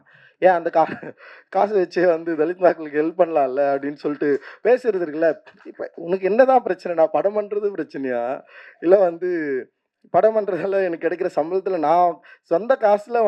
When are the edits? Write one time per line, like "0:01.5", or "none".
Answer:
none